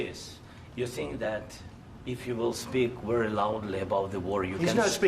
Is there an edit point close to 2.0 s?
no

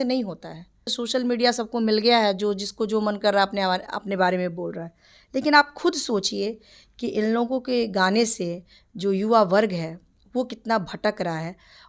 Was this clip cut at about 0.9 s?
yes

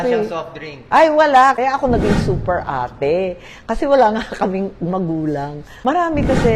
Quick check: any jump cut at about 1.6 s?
yes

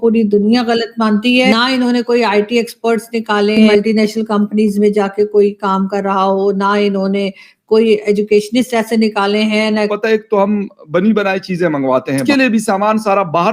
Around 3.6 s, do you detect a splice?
yes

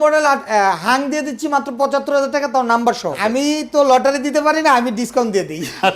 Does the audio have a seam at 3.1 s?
yes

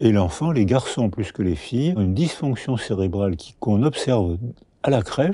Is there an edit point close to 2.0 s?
yes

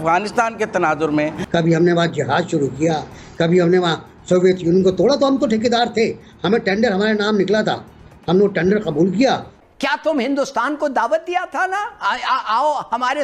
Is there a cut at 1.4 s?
yes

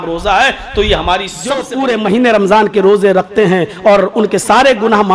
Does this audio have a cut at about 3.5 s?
no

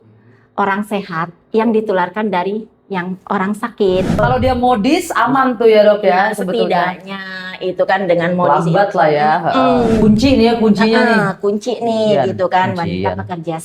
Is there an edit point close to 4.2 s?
yes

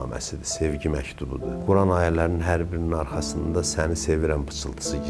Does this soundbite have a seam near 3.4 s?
no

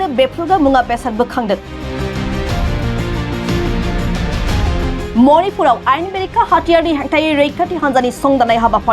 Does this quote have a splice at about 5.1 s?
yes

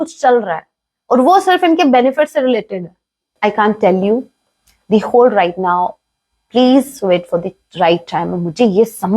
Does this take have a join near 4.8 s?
no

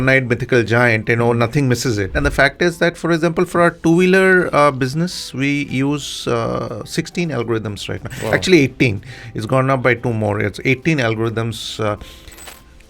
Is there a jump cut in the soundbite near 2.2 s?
yes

